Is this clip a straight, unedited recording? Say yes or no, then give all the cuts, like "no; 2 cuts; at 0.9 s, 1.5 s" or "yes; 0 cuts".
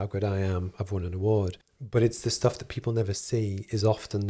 no; 1 cut; at 1.6 s